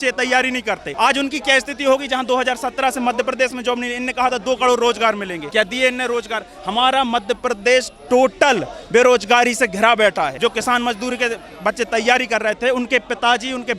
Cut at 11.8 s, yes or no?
no